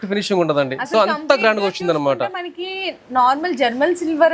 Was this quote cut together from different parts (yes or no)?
no